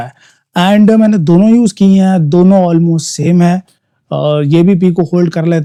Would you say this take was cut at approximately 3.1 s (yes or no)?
no